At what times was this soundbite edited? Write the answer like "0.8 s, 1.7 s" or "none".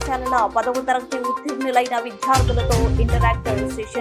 none